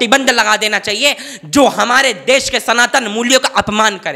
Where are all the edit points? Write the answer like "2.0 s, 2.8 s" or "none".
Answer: none